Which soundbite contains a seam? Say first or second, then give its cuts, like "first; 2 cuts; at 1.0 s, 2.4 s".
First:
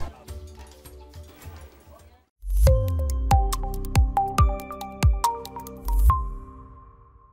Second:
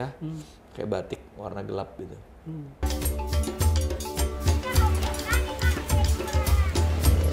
second; 1 cut; at 2.8 s